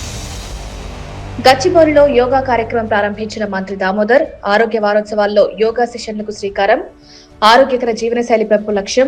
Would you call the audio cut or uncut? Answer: cut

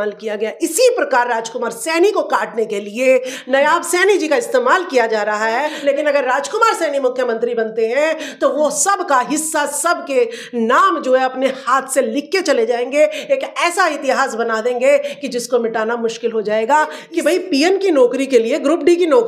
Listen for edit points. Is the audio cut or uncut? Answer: cut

